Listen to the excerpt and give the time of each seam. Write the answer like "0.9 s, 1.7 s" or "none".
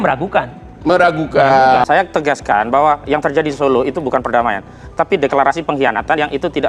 1.8 s